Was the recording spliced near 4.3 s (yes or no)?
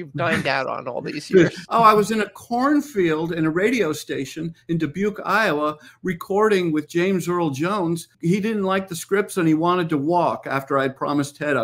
no